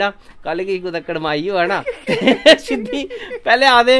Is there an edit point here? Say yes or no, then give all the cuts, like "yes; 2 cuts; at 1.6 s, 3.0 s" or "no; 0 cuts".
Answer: no; 0 cuts